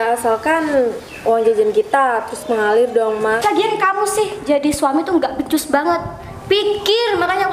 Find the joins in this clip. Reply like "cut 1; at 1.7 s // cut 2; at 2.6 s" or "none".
cut 1; at 3.4 s